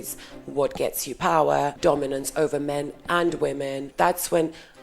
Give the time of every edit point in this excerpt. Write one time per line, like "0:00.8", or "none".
0:01.8
0:03.9